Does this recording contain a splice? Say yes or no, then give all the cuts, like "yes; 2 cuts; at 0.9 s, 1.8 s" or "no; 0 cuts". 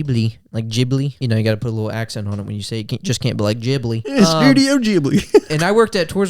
yes; 2 cuts; at 1.2 s, 4.1 s